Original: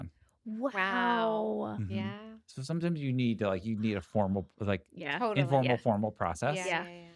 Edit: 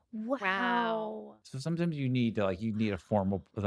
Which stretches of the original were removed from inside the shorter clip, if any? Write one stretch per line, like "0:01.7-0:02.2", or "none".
0:01.6-0:02.3

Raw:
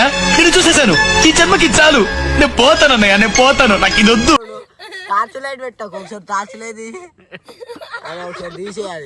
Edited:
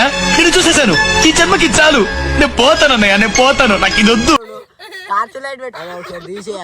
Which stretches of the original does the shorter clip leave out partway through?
0:05.7-0:08.0

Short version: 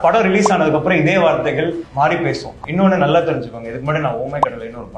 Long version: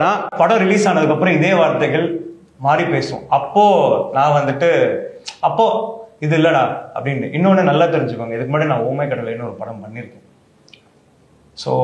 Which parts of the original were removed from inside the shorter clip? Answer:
0:02.2-0:02.5
0:03.2-0:07.2

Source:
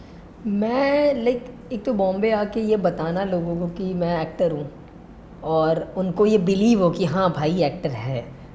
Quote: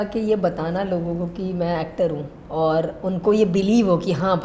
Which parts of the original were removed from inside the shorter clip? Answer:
0:04.8-0:05.3

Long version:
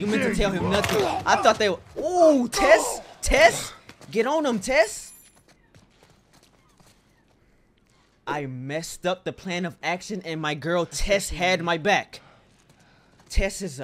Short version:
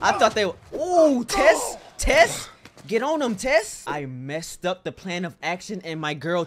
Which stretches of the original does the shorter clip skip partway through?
0:05.0-0:08.2

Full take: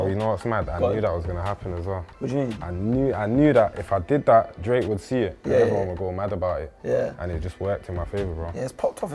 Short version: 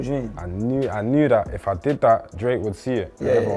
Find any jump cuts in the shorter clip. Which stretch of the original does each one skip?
none

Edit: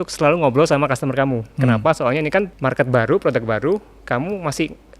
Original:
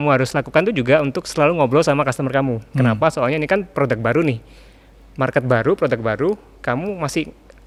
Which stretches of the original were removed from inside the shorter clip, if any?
0:03.7-0:05.1

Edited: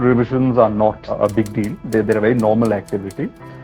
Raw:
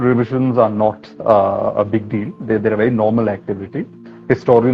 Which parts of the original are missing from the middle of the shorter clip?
0:01.1-0:01.7

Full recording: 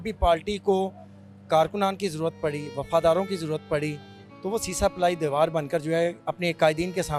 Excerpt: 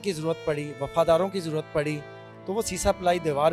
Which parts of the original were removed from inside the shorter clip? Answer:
none

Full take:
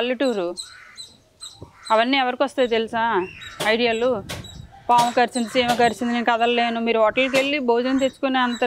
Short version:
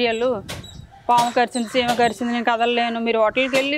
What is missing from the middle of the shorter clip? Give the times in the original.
none

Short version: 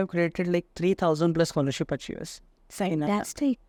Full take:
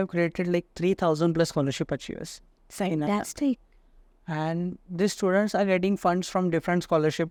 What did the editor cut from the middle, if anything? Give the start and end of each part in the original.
none

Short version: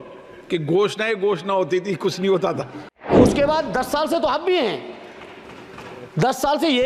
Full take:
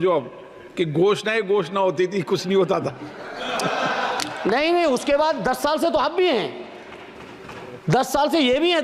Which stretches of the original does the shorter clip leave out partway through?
0:03.4-0:04.8

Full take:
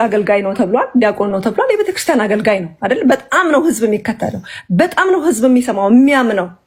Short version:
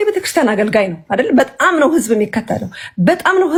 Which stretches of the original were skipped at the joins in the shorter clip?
none

